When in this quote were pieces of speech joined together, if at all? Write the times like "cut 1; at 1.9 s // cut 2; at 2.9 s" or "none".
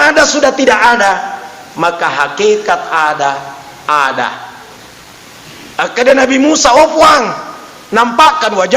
cut 1; at 5.7 s